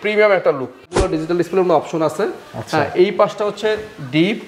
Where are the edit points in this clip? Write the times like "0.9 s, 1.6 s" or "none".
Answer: 1.1 s